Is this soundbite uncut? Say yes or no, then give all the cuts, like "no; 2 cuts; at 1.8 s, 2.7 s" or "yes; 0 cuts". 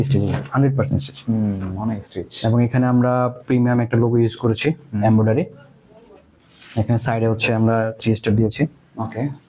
yes; 0 cuts